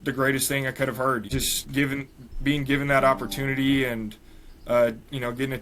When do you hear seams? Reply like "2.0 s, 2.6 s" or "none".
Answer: 1.3 s